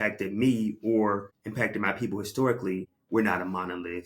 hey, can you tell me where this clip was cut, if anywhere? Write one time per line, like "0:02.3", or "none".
0:01.4
0:02.9